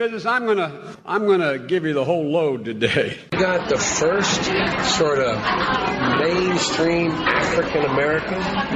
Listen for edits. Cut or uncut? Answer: uncut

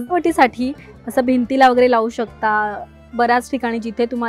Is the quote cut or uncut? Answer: uncut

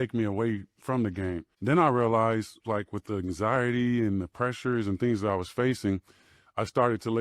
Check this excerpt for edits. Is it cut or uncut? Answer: cut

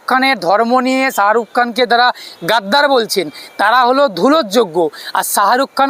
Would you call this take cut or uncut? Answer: uncut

